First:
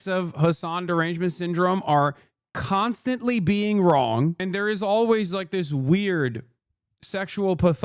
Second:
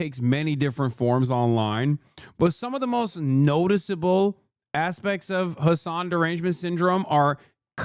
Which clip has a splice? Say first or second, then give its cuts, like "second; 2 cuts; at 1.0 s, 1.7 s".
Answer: first; 1 cut; at 4.4 s